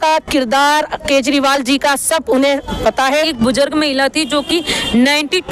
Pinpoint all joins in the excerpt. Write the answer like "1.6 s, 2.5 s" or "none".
3.3 s